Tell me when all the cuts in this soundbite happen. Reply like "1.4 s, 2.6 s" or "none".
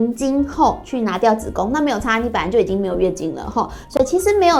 none